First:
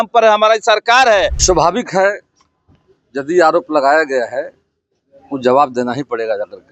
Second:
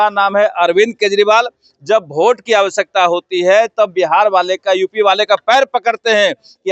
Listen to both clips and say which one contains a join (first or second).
first